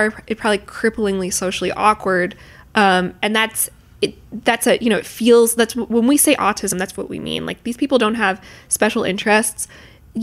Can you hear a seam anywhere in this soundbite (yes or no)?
no